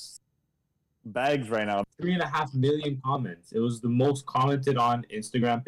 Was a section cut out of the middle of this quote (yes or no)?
yes